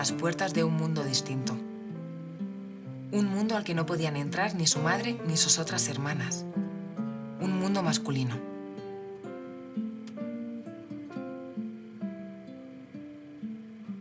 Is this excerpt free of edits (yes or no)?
yes